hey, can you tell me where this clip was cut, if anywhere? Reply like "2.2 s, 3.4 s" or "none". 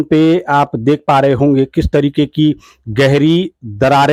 none